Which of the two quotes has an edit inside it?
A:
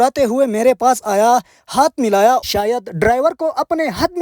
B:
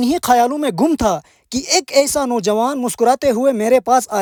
A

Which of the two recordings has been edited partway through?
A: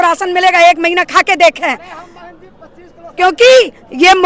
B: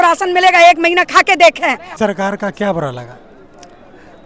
B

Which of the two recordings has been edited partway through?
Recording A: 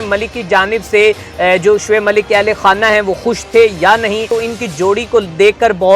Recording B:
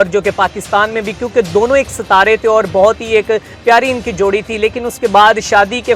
A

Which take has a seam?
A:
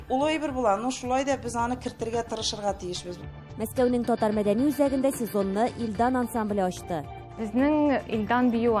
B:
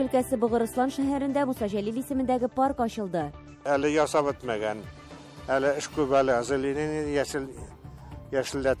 A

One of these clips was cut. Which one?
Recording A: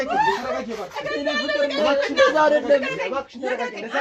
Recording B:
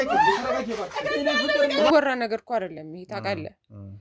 B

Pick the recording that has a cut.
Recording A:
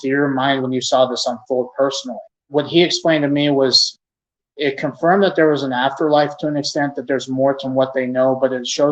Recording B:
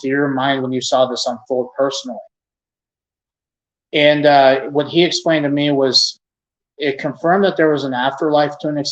A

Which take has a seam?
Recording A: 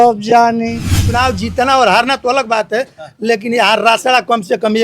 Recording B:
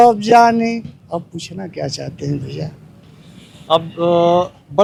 A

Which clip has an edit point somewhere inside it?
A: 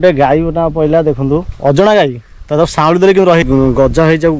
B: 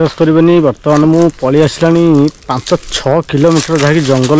A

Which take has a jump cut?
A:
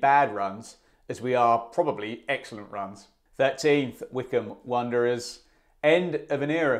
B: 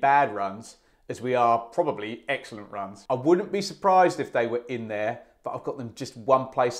B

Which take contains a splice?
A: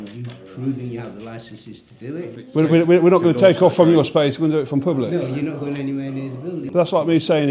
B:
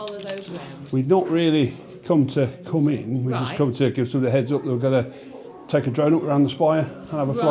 A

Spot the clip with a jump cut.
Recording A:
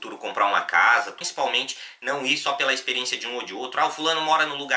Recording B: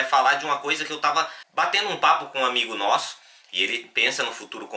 A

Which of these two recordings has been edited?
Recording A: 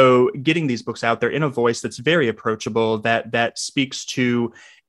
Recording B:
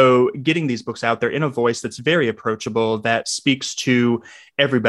B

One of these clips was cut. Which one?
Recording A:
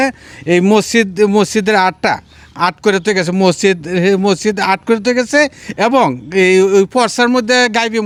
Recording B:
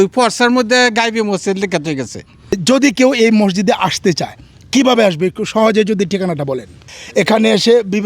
B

